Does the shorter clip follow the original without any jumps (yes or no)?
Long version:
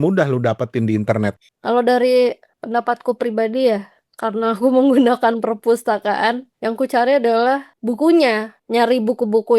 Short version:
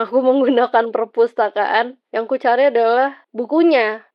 yes